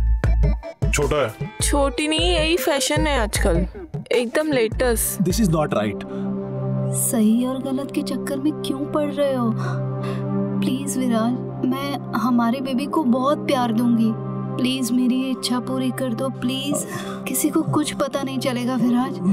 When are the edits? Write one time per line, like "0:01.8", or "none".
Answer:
0:05.1